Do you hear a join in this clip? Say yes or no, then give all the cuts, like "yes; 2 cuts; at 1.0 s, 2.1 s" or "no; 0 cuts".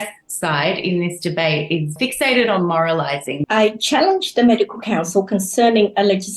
yes; 2 cuts; at 1.9 s, 3.4 s